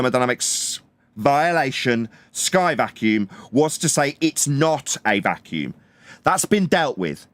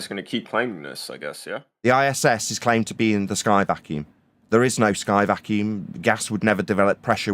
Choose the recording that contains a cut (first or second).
second